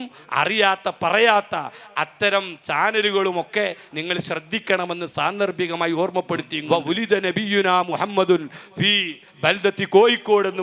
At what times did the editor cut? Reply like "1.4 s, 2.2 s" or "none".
6.5 s